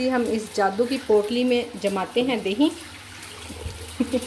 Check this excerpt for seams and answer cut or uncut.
uncut